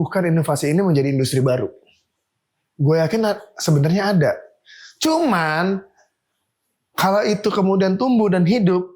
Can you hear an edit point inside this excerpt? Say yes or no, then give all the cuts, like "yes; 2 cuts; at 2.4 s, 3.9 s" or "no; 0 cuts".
no; 0 cuts